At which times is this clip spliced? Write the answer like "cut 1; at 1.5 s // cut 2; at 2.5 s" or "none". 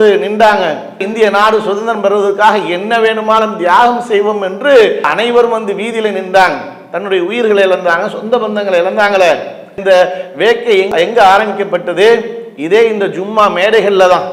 none